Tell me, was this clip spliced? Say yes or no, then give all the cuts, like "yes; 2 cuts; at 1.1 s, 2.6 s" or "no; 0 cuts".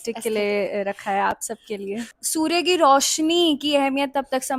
yes; 1 cut; at 2.2 s